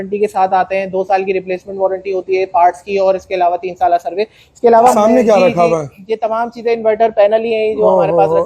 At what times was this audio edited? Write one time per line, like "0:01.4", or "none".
0:04.9